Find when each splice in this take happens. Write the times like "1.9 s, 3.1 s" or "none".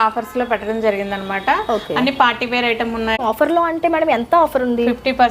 3.2 s